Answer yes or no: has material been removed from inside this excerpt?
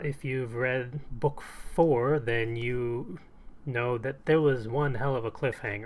no